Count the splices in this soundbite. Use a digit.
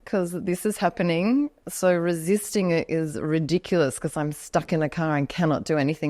1